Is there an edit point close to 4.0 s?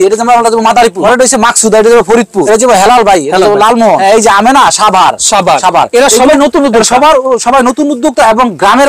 yes; 3 cuts; at 1.0 s, 2.4 s, 4.0 s

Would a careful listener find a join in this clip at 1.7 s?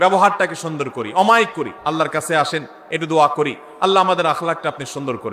yes; 1 cut; at 1.7 s

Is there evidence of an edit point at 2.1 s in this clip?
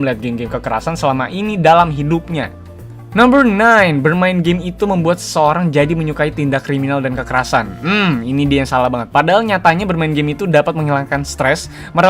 no; 1 cut; at 7.3 s

